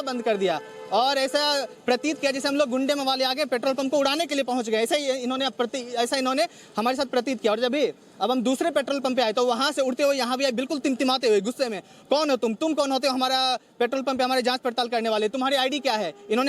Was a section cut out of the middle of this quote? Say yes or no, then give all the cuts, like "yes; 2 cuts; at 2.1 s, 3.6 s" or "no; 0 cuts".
no; 0 cuts